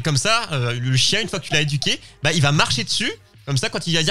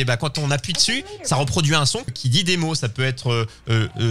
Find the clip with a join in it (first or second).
second